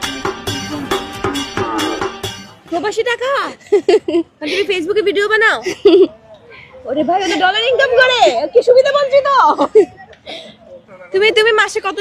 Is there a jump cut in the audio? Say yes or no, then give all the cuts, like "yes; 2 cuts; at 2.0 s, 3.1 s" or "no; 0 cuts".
no; 0 cuts